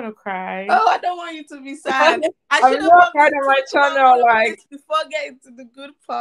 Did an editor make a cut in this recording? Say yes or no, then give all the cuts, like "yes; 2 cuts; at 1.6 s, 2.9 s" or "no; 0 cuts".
no; 0 cuts